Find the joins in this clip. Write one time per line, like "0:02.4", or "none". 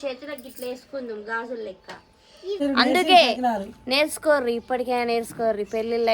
0:02.6